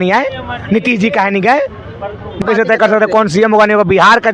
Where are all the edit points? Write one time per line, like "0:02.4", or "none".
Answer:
0:02.4